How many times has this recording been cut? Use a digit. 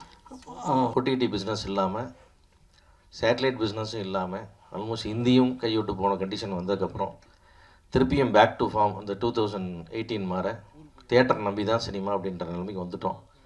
1